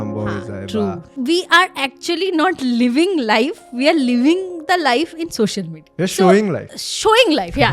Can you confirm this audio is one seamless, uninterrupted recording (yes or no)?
no